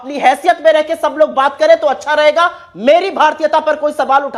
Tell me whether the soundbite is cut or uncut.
uncut